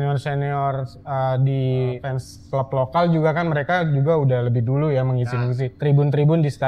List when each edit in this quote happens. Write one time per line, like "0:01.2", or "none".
0:02.0
0:05.7